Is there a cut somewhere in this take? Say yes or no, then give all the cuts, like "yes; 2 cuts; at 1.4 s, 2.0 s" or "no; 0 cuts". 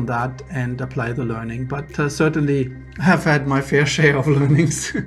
no; 0 cuts